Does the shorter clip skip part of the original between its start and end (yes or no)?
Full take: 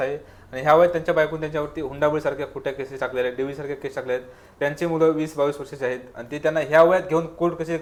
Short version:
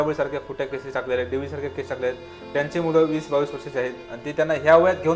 no